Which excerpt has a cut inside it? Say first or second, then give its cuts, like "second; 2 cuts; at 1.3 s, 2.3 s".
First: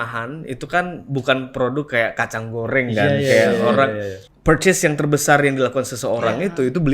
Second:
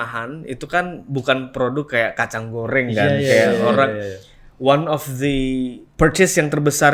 first; 1 cut; at 4.3 s